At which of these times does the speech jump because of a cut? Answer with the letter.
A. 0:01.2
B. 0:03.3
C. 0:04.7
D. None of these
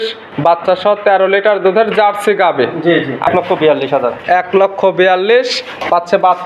B